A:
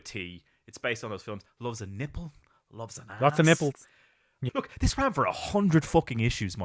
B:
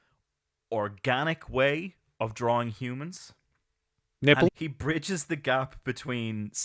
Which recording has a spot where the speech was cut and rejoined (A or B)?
A